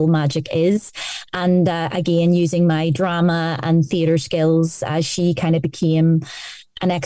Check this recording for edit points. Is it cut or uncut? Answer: uncut